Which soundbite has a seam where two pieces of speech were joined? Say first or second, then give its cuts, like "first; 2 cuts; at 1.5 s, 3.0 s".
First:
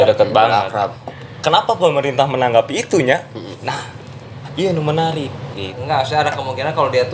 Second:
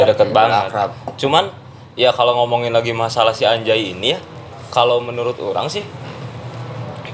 first; 2 cuts; at 1.1 s, 5.7 s